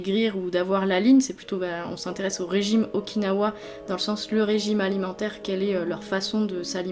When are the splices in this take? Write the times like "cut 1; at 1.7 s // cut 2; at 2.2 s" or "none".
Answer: none